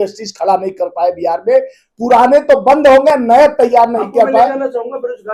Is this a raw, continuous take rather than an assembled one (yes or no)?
yes